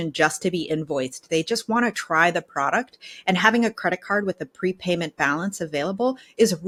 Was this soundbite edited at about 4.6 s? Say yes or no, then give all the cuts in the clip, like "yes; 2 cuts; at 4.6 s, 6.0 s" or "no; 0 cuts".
no; 0 cuts